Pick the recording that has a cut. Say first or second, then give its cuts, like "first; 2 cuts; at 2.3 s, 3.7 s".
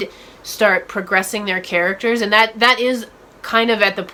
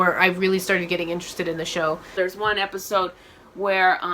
second; 1 cut; at 2.1 s